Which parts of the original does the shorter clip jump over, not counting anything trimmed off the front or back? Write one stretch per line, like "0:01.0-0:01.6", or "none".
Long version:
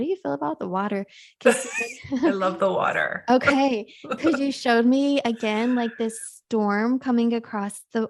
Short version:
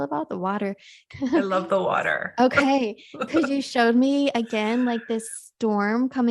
0:01.2-0:01.8